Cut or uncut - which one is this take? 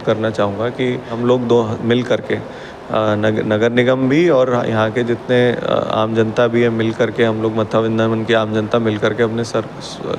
cut